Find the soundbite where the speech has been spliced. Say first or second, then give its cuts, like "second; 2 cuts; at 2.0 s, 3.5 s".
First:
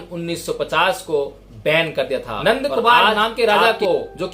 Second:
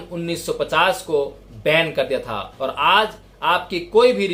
first; 1 cut; at 2.4 s